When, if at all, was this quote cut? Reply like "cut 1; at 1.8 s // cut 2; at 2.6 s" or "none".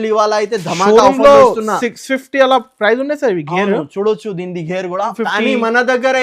cut 1; at 5.1 s